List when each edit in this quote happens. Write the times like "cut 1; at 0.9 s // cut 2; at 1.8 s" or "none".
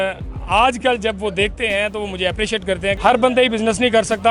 cut 1; at 3.0 s